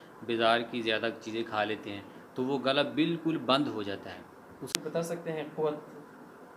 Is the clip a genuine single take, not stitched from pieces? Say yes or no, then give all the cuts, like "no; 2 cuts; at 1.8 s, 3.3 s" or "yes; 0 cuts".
no; 1 cut; at 4.7 s